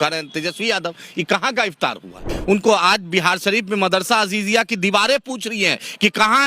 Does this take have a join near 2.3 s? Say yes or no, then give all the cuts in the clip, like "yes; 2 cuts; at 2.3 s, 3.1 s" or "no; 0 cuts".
yes; 1 cut; at 2.3 s